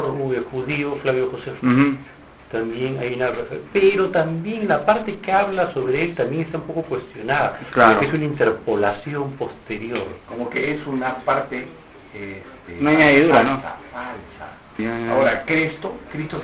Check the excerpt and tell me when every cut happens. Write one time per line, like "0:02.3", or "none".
0:06.0